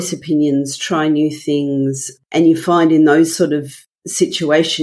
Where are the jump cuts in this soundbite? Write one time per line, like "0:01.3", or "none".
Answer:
0:02.1